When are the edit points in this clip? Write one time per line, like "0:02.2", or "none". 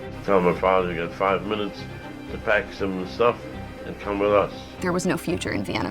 0:04.8